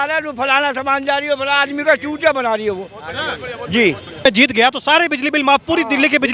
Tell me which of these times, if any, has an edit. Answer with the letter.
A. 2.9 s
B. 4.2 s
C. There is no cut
B